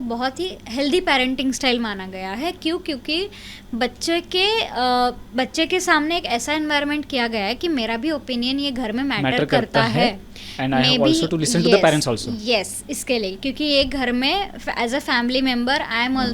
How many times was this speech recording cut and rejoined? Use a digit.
0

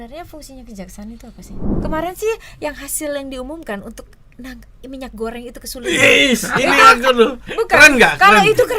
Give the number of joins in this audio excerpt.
1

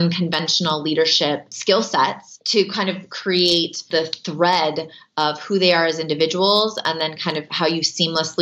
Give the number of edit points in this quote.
3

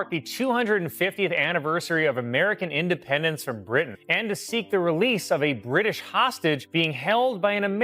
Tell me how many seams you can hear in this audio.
2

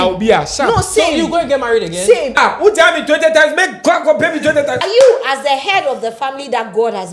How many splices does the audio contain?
2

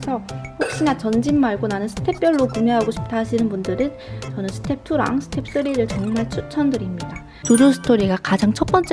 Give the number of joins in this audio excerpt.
1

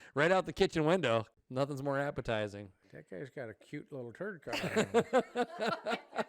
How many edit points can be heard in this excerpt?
2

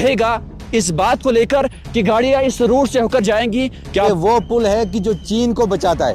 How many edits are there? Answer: 1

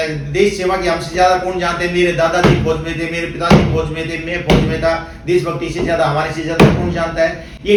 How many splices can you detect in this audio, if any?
0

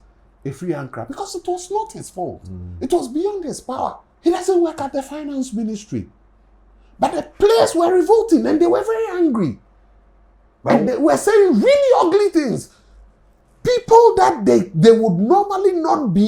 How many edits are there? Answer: 1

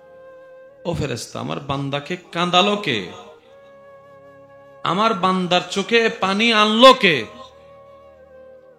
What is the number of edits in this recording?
1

